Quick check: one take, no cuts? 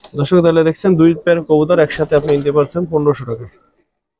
yes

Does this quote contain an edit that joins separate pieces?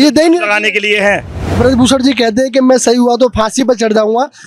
yes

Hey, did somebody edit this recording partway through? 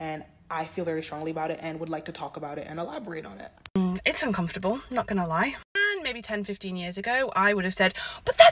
yes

